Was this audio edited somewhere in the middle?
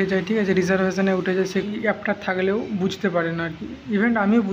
yes; 1 cut; at 1.7 s

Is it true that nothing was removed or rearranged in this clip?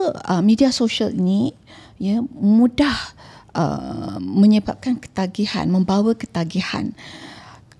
yes; 0 cuts

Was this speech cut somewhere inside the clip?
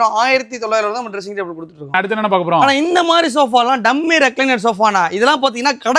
no; 0 cuts

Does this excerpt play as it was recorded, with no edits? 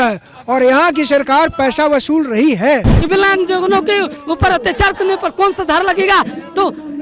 no; 1 cut; at 2.9 s

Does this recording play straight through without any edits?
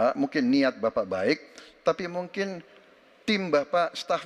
yes; 0 cuts

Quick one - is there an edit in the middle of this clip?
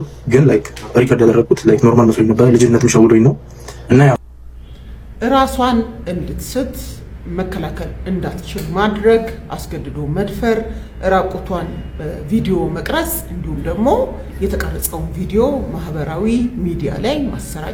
no; 0 cuts

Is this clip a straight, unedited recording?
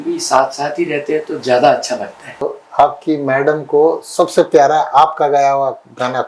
no; 1 cut; at 2.4 s

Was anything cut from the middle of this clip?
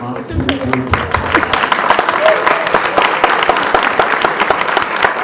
no; 0 cuts

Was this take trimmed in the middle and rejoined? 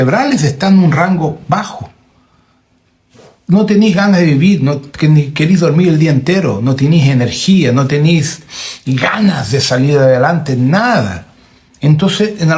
no; 0 cuts

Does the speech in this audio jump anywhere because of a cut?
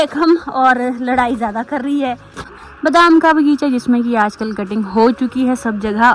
yes; 1 cut; at 2.6 s

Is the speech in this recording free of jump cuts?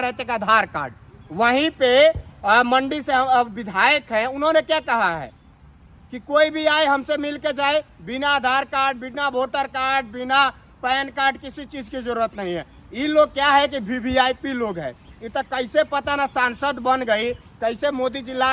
yes; 0 cuts

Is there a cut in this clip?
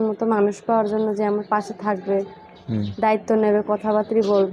no; 0 cuts

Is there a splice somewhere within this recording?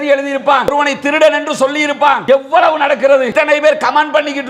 yes; 3 cuts; at 0.7 s, 2.2 s, 3.3 s

